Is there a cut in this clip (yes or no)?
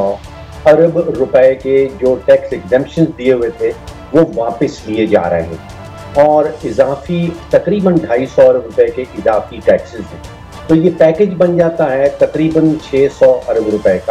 no